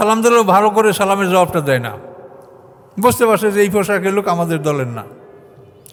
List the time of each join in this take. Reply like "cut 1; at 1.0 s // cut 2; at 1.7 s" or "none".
none